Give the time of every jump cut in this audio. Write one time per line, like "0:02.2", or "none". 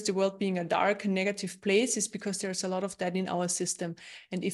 none